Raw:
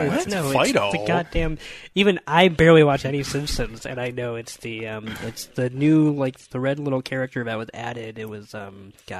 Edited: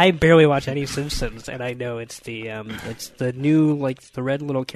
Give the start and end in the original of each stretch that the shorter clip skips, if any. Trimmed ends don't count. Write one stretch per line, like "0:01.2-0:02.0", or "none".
none